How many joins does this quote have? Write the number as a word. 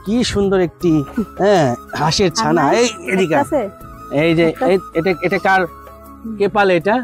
zero